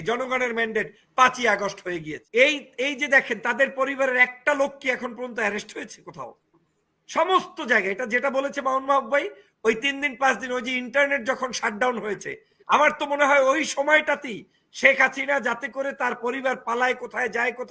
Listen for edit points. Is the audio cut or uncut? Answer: cut